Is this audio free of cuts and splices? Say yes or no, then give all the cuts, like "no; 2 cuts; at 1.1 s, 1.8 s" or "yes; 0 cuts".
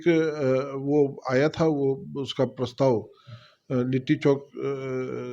yes; 0 cuts